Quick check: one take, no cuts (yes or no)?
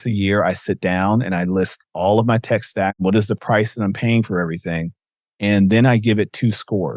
no